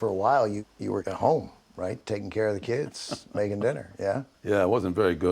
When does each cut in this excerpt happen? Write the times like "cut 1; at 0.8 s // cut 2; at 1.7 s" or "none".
cut 1; at 1.1 s